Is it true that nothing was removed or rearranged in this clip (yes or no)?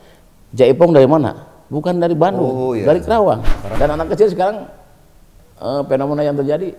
no